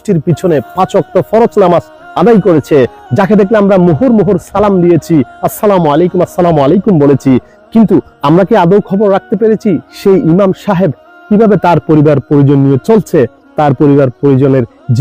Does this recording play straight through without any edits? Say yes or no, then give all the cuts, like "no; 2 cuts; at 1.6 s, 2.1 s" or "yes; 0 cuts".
yes; 0 cuts